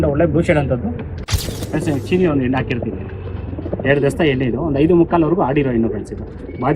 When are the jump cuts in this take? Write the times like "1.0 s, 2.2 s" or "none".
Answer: 1.1 s

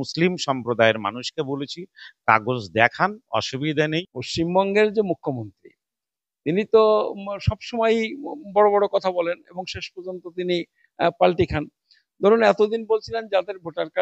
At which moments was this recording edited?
4.2 s

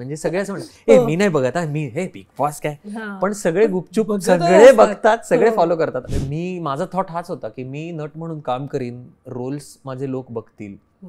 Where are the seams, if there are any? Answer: 6.1 s

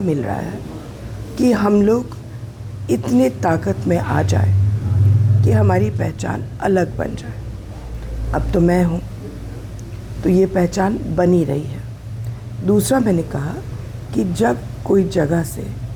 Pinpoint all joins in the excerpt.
none

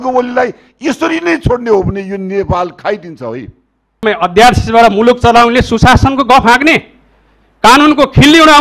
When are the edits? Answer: 4.0 s

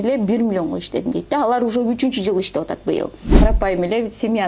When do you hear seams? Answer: 3.3 s

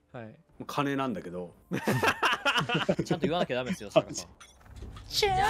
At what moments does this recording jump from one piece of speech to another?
3.0 s, 4.2 s

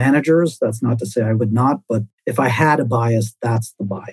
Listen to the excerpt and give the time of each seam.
2.2 s

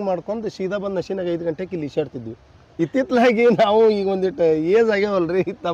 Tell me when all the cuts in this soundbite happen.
2.6 s

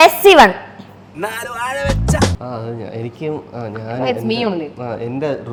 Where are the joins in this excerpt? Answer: none

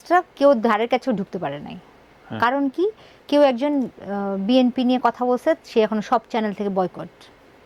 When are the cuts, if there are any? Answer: none

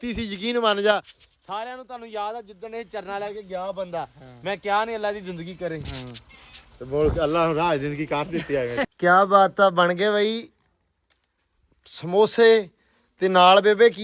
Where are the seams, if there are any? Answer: 8.9 s

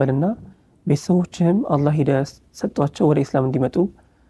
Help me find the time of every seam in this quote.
none

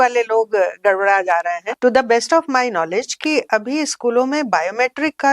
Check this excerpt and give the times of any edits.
1.7 s

